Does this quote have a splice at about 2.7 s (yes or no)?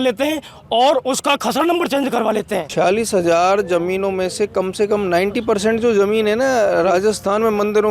yes